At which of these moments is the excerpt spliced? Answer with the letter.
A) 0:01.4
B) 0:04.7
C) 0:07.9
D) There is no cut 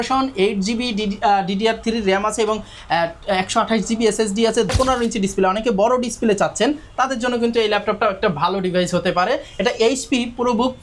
B